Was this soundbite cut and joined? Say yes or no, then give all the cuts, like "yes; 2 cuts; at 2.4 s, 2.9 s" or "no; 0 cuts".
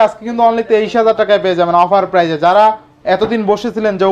no; 0 cuts